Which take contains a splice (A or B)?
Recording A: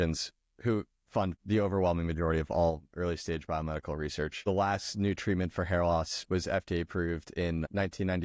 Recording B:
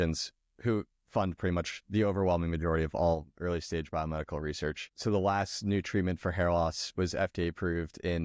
A